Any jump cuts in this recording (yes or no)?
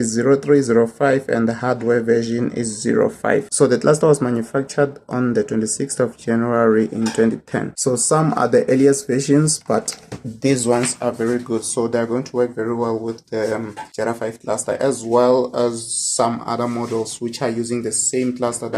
no